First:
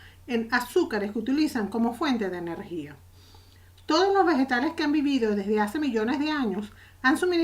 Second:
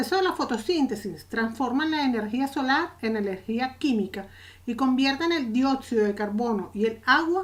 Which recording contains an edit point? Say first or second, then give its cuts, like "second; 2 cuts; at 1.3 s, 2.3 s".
first; 1 cut; at 5.6 s